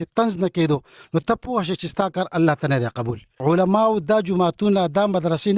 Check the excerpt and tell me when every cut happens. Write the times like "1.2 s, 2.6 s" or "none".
3.2 s